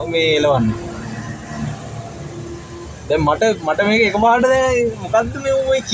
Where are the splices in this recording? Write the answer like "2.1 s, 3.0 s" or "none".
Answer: none